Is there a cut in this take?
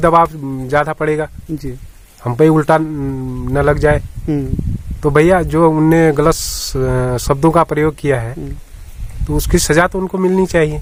no; 0 cuts

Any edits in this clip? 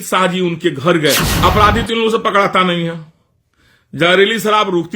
yes; 1 cut; at 1.3 s

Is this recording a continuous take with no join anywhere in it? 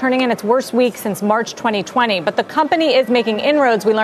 yes; 0 cuts

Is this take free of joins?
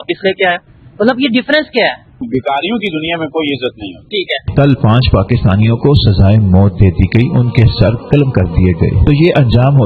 no; 2 cuts; at 2.2 s, 4.5 s

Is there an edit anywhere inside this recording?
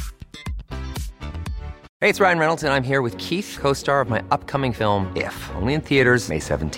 yes; 1 cut; at 1.8 s

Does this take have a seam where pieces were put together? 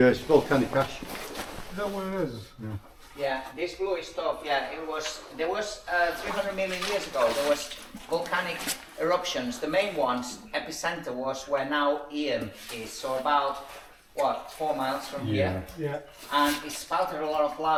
no; 0 cuts

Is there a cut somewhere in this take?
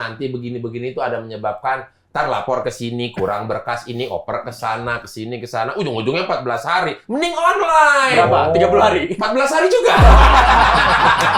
no; 0 cuts

